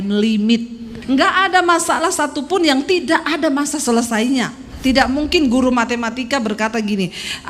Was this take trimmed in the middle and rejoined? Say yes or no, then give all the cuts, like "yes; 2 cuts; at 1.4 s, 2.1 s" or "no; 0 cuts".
yes; 2 cuts; at 0.9 s, 4.7 s